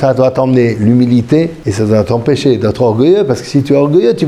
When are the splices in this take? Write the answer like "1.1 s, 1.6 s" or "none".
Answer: 1.6 s